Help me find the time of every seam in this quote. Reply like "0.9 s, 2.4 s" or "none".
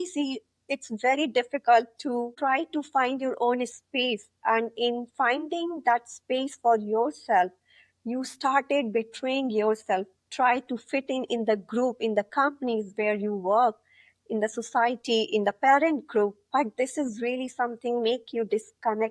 2.3 s

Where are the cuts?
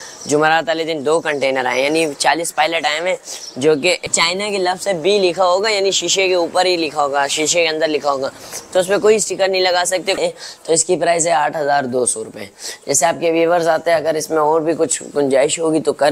4.1 s, 10.2 s

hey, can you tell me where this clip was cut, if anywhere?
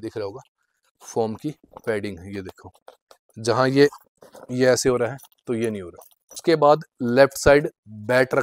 6.4 s

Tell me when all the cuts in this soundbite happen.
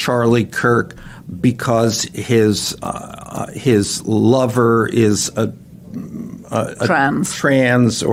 none

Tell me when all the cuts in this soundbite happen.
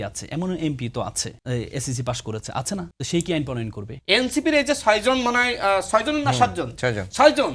1.3 s, 2.9 s, 3.9 s

